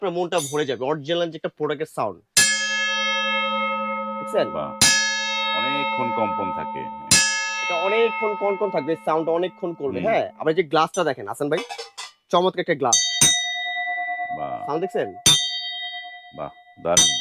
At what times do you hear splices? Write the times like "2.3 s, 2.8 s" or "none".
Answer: none